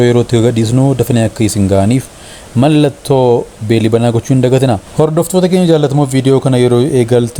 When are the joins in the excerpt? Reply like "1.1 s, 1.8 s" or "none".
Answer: 4.8 s